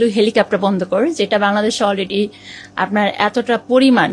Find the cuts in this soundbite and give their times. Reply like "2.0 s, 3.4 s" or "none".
none